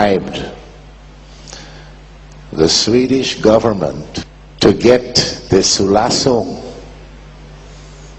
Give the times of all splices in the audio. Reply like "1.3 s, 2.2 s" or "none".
1.4 s